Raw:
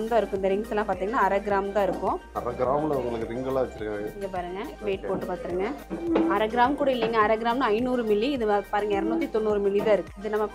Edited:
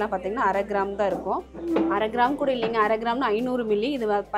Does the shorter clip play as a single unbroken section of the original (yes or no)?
no